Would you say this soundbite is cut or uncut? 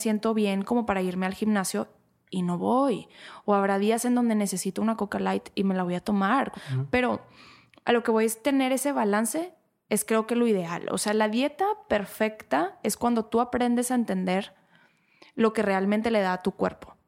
cut